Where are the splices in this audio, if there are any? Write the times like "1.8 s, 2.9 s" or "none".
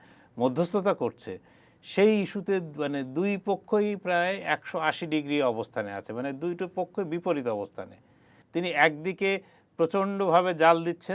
8.4 s